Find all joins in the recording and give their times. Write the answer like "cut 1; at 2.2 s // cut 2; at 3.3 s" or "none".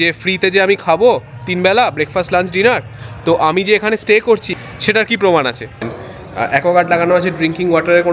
cut 1; at 4.5 s // cut 2; at 6.0 s